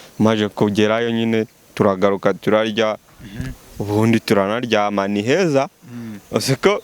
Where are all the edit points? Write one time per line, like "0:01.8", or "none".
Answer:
none